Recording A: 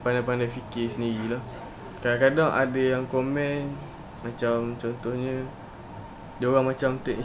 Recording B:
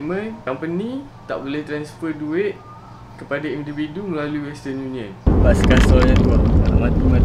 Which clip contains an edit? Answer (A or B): B